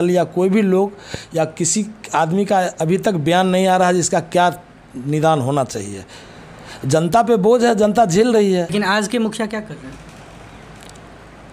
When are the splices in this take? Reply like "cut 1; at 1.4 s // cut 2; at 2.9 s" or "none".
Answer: cut 1; at 8.7 s